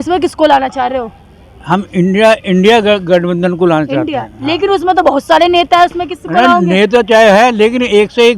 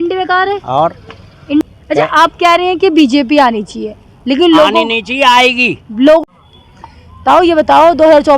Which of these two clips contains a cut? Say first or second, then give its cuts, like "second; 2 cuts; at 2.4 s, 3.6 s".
second; 2 cuts; at 1.8 s, 6.2 s